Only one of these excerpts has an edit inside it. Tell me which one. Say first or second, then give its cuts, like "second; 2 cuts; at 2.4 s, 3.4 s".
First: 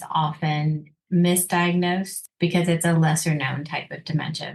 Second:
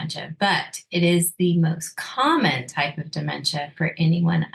first; 2 cuts; at 0.9 s, 2.2 s